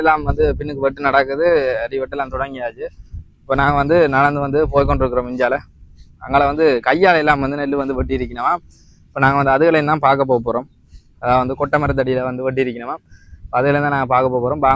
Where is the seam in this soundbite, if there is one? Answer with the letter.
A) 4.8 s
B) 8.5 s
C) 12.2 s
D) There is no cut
D